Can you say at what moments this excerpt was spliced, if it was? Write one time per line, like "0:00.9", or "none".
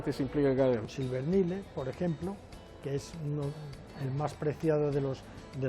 0:00.9